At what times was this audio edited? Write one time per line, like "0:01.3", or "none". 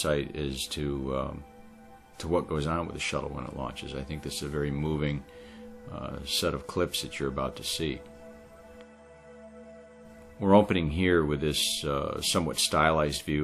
0:08.2